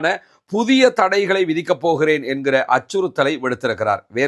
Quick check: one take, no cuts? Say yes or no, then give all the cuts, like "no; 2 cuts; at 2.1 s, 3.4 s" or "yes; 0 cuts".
yes; 0 cuts